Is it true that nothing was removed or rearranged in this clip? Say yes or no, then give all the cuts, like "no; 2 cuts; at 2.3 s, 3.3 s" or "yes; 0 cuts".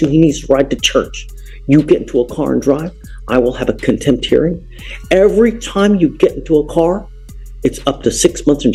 yes; 0 cuts